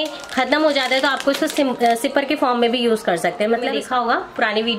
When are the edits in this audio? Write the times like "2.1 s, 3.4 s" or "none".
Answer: 3.8 s